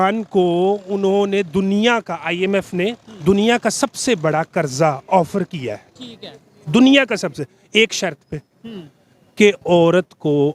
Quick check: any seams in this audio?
no; 0 cuts

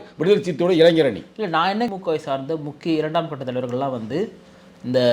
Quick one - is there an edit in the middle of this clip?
yes; 1 cut; at 1.9 s

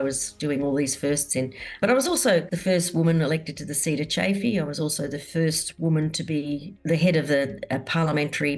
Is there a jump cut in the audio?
yes; 3 cuts; at 1.8 s, 2.5 s, 6.7 s

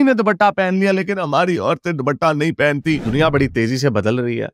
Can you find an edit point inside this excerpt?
yes; 1 cut; at 3.0 s

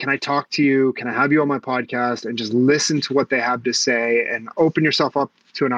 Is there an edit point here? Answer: yes; 1 cut; at 4.5 s

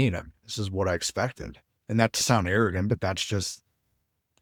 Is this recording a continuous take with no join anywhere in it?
yes; 0 cuts

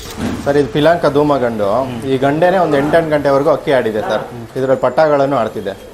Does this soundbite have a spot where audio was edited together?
no; 0 cuts

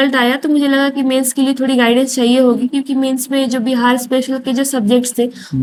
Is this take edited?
no; 0 cuts

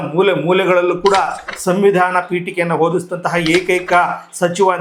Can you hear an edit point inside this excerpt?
no; 0 cuts

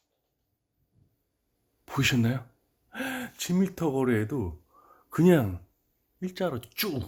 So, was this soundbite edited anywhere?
no; 0 cuts

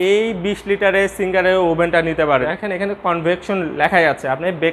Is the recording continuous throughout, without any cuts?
no; 1 cut; at 2.5 s

